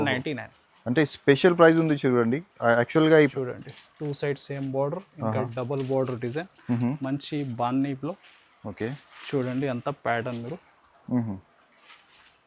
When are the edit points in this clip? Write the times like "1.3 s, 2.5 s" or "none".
3.3 s